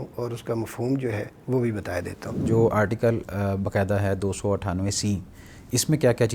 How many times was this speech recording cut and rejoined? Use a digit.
1